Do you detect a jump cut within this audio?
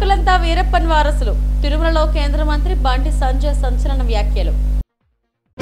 no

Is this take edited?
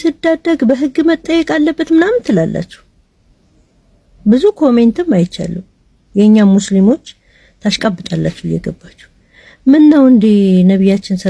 no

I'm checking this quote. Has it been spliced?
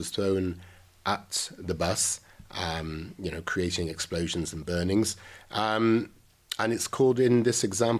no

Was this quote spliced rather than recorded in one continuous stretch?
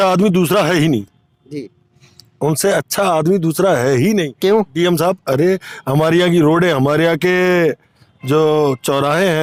no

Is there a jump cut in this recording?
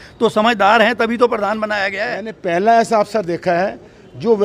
yes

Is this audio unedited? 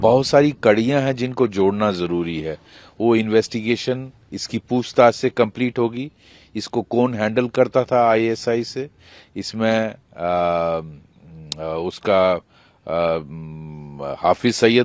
yes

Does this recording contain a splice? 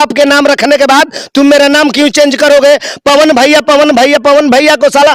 no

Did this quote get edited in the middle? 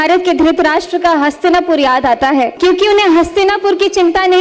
yes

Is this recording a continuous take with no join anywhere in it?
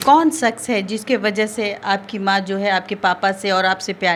yes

